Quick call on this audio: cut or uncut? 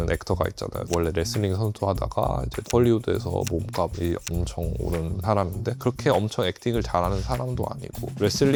uncut